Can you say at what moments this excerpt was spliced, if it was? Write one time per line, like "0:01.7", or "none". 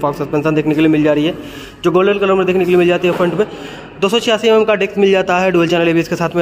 none